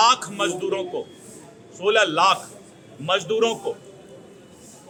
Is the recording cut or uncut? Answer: uncut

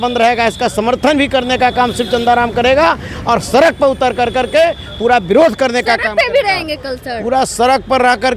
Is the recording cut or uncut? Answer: uncut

